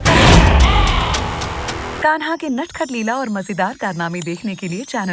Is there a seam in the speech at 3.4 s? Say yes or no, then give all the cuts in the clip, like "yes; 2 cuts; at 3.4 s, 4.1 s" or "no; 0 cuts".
no; 1 cut; at 1.9 s